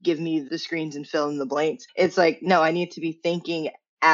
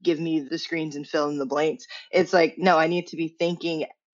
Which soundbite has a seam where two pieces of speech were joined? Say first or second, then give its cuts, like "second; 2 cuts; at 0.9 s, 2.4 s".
first; 1 cut; at 1.8 s